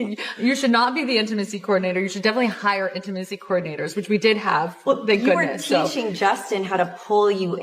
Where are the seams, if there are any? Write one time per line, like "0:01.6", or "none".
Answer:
none